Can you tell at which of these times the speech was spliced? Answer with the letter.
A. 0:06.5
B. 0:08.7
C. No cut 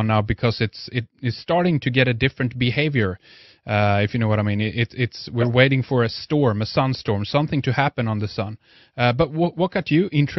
C